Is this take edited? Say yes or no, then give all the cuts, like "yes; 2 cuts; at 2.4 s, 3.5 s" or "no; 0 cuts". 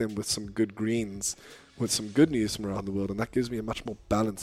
no; 0 cuts